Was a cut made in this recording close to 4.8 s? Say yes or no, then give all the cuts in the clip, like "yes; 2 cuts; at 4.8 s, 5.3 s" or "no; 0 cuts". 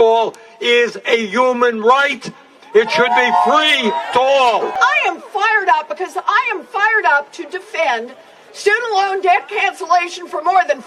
yes; 1 cut; at 4.8 s